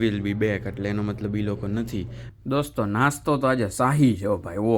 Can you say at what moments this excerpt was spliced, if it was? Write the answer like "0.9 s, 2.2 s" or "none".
2.2 s